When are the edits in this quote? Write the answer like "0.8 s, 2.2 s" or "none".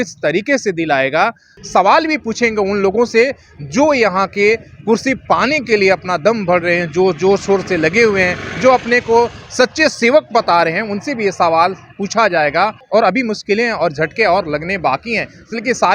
1.5 s, 12.8 s